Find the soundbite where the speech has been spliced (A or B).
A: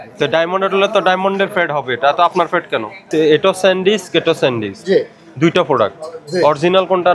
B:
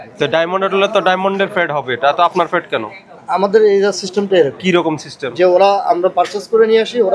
A